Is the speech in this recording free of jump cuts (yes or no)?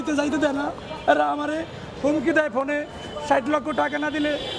yes